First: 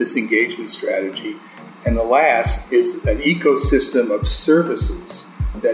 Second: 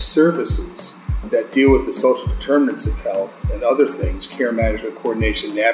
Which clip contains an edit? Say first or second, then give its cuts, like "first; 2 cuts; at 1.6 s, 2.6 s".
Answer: first; 2 cuts; at 1.5 s, 3.0 s